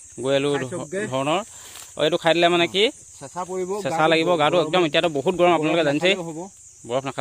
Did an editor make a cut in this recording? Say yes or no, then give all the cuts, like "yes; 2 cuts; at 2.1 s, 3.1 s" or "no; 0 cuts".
no; 0 cuts